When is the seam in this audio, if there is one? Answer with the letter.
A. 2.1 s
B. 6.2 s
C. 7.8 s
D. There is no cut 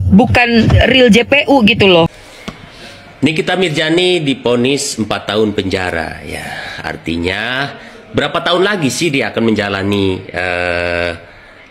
A